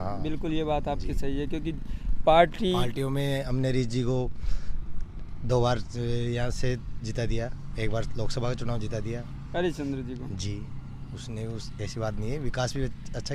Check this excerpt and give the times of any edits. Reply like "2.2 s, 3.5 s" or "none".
none